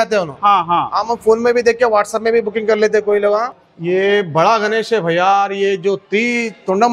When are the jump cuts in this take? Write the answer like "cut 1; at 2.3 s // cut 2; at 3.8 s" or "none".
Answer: cut 1; at 3.5 s